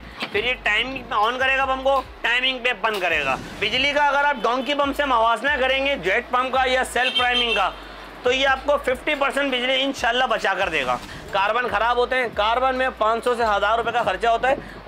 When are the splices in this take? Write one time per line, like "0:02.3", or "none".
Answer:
0:03.5
0:11.1